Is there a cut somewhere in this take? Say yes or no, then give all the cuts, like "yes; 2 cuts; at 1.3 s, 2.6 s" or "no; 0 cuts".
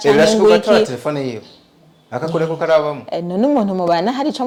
no; 0 cuts